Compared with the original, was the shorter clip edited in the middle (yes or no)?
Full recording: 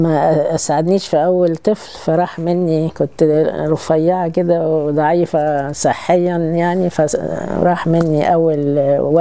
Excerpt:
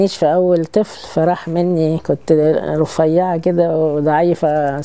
no